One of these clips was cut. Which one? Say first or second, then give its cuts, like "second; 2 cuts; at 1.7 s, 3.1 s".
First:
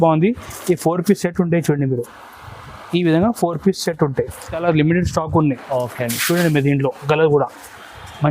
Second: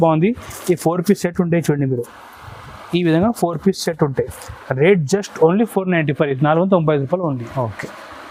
first; 1 cut; at 4.6 s